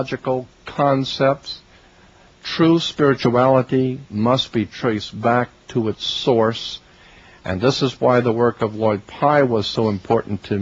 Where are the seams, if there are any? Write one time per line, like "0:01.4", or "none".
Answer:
0:08.8